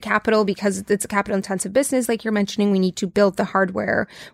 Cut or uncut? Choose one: uncut